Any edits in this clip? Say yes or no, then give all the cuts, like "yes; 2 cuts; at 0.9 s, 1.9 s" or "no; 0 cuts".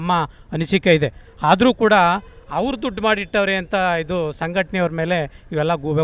no; 0 cuts